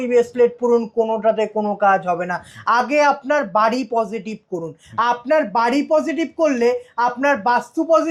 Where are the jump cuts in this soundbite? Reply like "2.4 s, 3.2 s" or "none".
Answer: none